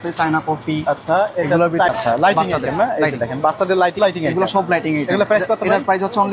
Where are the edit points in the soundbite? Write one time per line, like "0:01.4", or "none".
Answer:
0:01.9
0:04.0

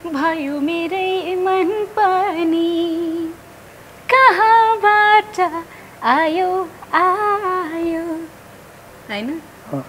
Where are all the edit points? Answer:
none

